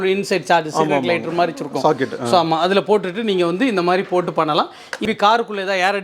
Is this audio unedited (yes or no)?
no